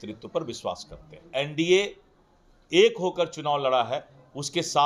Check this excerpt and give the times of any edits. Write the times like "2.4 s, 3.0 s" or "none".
1.2 s